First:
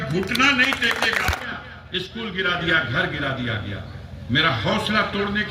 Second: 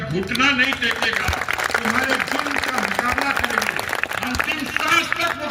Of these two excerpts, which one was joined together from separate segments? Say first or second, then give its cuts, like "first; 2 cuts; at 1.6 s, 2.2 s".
first; 1 cut; at 1.4 s